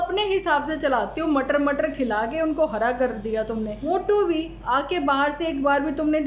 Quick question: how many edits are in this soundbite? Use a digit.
1